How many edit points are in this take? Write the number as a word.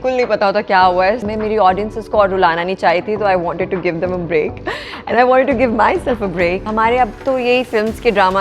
two